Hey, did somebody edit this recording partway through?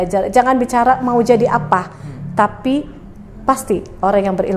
no; 0 cuts

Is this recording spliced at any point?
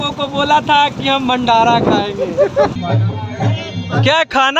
yes; 1 cut; at 2.7 s

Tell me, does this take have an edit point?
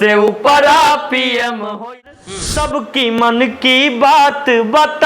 yes; 1 cut; at 2.1 s

